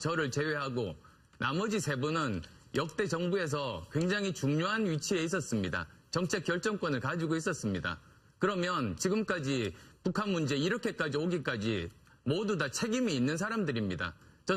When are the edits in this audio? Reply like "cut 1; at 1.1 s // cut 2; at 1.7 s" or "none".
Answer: cut 1; at 11.4 s